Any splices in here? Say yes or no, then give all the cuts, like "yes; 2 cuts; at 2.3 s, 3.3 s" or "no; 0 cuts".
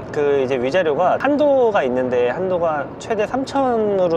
no; 0 cuts